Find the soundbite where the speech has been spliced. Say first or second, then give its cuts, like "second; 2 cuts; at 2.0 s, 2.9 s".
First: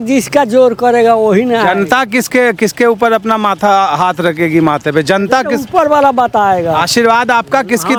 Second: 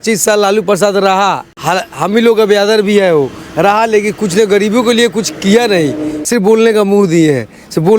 second; 2 cuts; at 1.5 s, 6.2 s